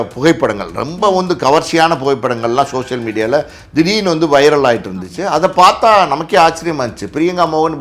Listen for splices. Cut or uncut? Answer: uncut